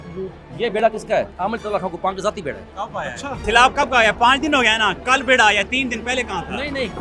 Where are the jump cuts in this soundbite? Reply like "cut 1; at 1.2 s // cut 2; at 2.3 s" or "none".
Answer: cut 1; at 1.3 s // cut 2; at 3.4 s